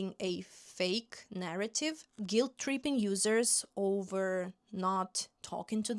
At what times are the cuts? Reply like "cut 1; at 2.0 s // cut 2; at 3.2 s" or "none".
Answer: none